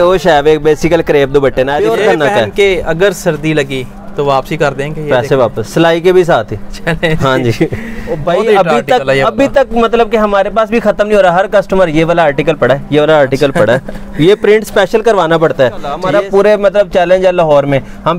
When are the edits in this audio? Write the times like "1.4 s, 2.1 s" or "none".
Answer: 1.8 s, 8.0 s, 16.0 s